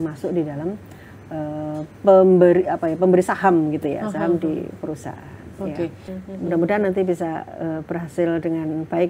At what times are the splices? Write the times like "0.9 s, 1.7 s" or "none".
6.1 s